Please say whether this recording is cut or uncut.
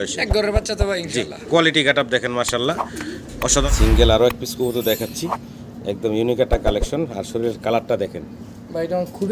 cut